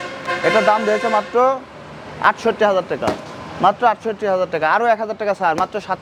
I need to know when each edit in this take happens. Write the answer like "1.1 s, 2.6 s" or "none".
none